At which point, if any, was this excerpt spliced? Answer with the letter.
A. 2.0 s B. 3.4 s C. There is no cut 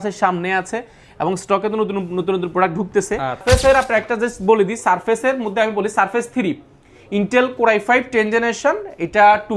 B